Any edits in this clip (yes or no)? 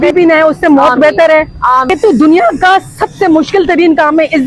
yes